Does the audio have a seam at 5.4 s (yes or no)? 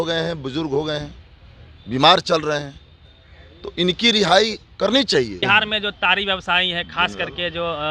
yes